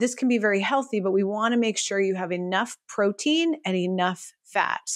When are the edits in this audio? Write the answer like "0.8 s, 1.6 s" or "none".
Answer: none